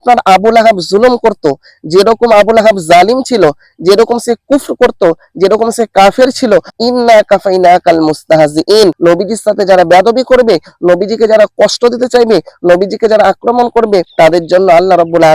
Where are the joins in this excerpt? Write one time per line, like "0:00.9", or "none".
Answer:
0:06.7
0:09.0
0:14.1